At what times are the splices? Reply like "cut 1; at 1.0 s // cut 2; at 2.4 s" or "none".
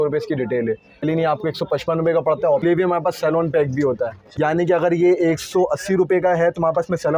cut 1; at 1.0 s // cut 2; at 2.6 s // cut 3; at 4.2 s